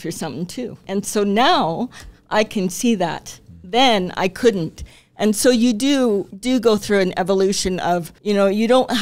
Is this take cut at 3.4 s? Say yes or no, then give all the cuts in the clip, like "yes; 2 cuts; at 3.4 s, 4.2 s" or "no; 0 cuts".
no; 3 cuts; at 0.8 s, 6.3 s, 8.1 s